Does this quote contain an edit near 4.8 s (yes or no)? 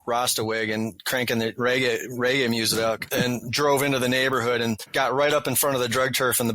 yes